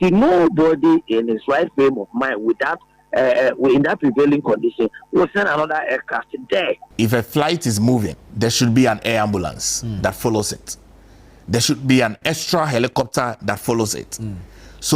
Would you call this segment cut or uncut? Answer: cut